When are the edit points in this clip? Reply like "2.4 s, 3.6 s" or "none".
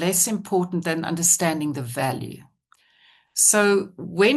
none